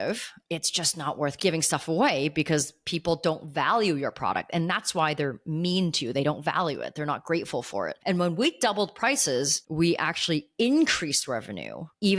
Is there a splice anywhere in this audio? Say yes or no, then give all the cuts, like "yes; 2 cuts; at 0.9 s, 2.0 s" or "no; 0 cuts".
no; 0 cuts